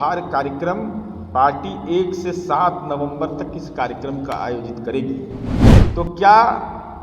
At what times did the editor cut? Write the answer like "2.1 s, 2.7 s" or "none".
5.6 s